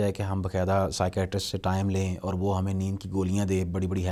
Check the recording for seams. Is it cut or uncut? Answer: uncut